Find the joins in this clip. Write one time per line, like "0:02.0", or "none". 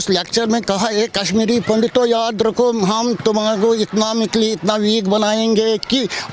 none